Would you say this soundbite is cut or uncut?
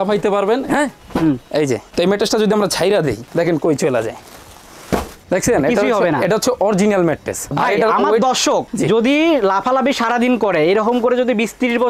cut